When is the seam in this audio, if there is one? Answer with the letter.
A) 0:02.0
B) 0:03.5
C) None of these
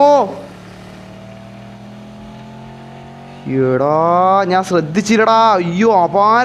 C